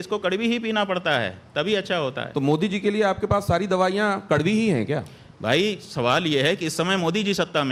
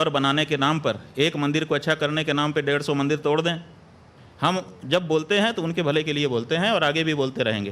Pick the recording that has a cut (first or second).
second